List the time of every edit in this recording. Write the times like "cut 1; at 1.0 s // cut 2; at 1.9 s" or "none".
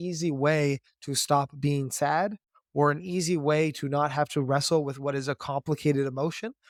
none